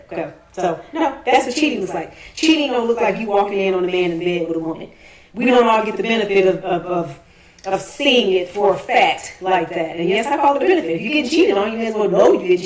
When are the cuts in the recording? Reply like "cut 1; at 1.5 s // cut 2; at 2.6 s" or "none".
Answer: none